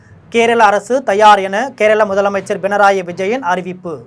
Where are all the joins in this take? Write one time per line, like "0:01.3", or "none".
none